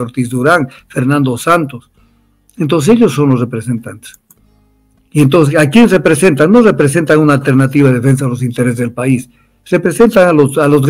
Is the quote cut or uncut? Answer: uncut